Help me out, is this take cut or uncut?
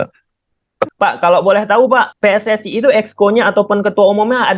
cut